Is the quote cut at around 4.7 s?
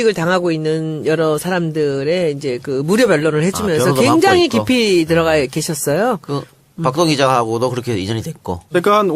no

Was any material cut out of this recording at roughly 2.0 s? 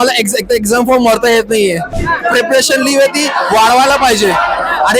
yes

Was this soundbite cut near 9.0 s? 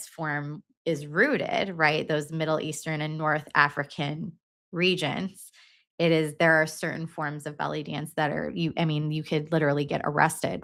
no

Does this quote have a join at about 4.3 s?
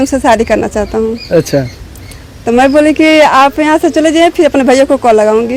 no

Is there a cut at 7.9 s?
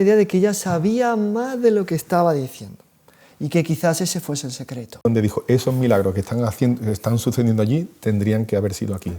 no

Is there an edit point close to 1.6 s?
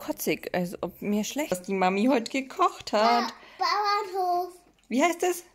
yes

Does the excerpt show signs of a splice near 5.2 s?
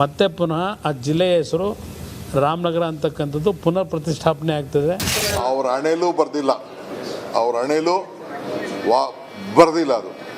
yes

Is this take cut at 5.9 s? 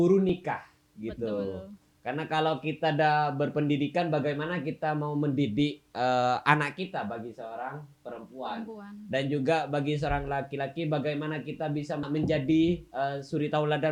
no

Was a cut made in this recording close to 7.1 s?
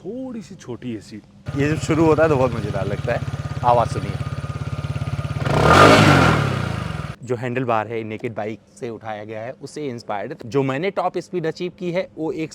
yes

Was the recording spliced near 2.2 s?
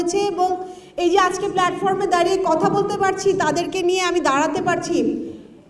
no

